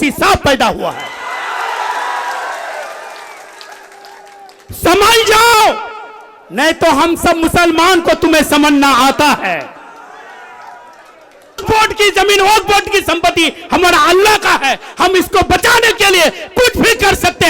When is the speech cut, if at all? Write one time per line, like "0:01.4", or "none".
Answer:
0:11.6